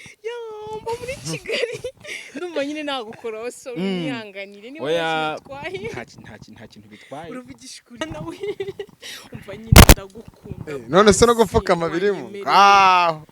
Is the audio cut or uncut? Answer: cut